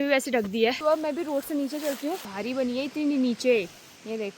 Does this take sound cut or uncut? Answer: cut